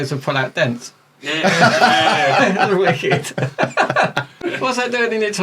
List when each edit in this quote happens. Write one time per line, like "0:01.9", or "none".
0:04.4